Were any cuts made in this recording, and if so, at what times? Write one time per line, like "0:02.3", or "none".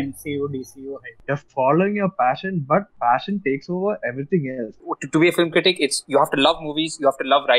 0:01.1
0:04.9